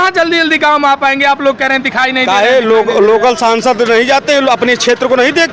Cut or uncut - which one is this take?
uncut